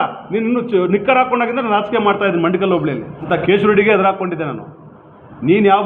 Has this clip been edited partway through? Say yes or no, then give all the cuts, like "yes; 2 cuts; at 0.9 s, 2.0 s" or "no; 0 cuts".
yes; 1 cut; at 3.3 s